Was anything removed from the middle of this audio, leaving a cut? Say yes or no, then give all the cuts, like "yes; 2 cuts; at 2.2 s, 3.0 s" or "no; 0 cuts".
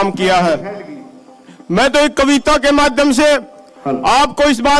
no; 0 cuts